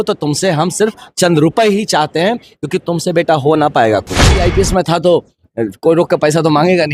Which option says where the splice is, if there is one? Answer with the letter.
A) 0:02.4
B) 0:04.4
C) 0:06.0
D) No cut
B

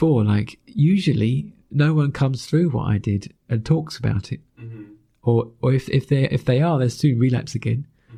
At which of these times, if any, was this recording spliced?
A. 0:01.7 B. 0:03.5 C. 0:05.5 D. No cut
D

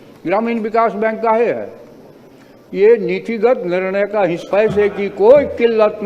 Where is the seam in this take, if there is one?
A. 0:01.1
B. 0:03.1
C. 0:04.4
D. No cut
C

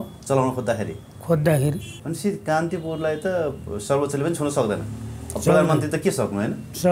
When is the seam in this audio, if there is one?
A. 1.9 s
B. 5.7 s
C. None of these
A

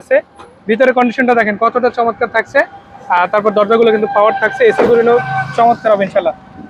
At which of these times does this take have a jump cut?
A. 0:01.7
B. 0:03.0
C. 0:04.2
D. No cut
D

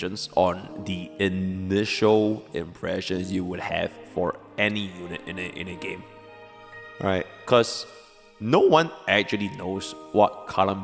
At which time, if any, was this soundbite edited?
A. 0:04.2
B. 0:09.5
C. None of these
C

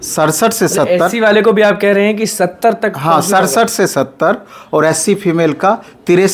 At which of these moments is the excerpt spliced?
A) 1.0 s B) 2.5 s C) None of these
C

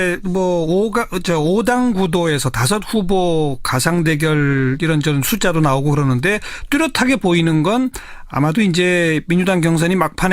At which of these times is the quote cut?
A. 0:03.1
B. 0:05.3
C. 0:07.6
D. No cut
C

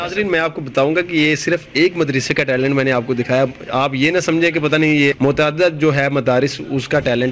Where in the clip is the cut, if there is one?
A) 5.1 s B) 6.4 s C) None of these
A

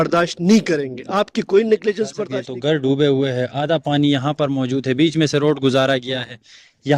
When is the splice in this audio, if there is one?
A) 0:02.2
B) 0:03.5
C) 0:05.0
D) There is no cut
A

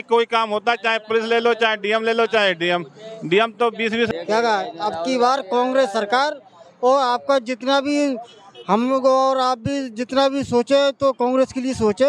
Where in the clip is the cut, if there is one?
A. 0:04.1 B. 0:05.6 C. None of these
A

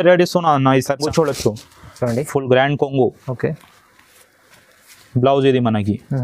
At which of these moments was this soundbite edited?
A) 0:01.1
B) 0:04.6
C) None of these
A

